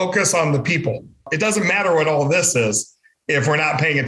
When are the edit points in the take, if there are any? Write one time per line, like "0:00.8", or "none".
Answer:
0:01.3